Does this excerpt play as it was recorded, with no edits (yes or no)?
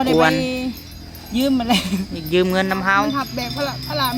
no